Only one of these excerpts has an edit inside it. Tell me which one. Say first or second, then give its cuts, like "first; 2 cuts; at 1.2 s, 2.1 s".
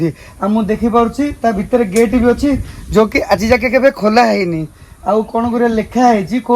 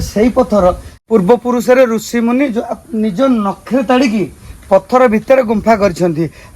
second; 1 cut; at 0.9 s